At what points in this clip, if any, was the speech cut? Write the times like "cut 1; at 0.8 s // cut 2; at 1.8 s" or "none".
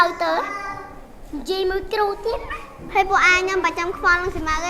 cut 1; at 2.8 s